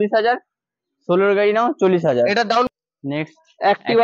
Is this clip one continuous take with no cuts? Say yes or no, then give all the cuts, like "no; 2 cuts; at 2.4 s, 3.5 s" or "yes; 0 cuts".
no; 1 cut; at 2.7 s